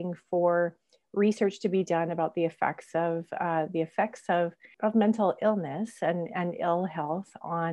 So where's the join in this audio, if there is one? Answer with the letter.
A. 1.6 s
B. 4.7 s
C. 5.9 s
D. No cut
B